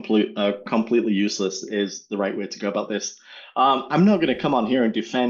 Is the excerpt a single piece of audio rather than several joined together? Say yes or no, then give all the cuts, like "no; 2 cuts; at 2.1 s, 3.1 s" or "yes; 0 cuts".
yes; 0 cuts